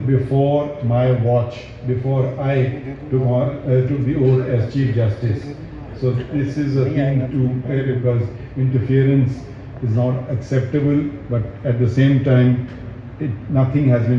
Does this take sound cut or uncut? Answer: cut